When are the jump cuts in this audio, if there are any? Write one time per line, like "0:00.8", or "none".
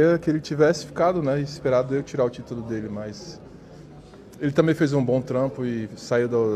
none